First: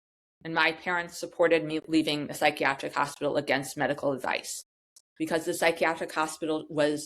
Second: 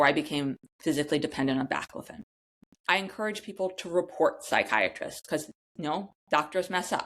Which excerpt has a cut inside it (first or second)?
first